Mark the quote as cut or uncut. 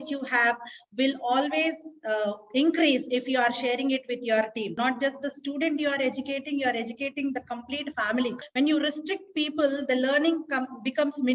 cut